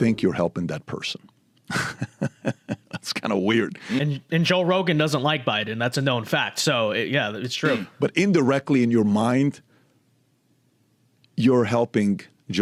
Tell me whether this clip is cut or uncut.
uncut